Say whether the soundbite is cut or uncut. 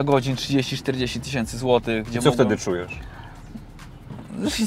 uncut